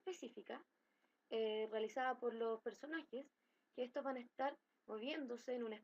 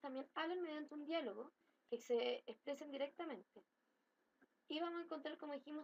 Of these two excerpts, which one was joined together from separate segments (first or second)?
first